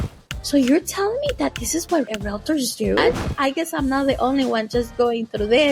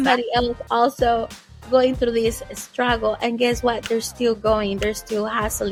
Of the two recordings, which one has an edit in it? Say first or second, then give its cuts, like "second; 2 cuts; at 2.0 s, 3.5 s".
first; 2 cuts; at 2.1 s, 3.3 s